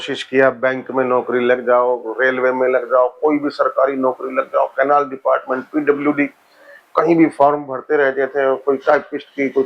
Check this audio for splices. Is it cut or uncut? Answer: uncut